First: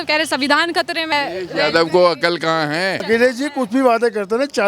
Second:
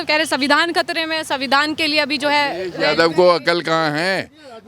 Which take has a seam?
first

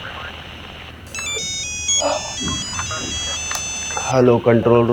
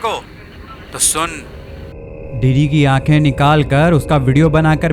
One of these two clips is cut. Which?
second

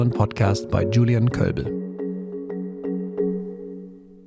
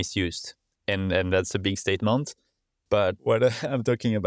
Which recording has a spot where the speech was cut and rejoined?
second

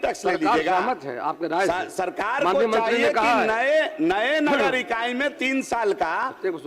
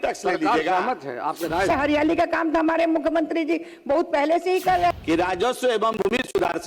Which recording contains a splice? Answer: second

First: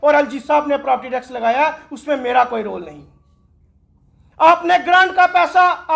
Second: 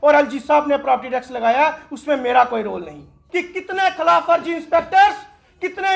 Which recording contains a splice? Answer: second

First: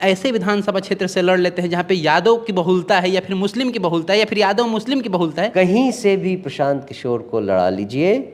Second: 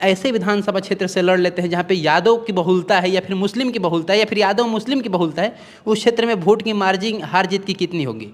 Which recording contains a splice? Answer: first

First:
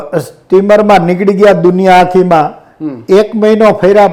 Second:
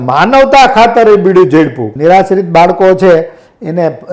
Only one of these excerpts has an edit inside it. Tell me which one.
second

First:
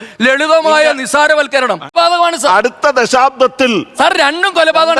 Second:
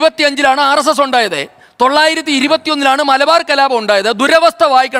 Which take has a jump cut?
first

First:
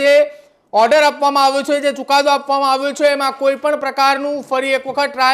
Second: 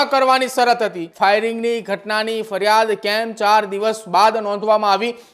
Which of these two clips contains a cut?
second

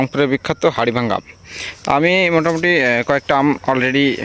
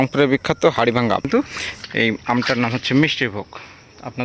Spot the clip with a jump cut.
second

